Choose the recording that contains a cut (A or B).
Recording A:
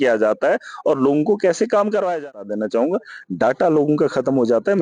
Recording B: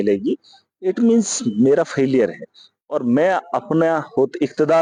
A